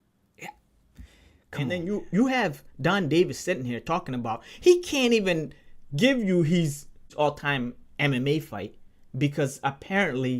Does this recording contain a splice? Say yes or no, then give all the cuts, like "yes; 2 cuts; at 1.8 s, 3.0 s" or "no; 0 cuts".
yes; 1 cut; at 1.8 s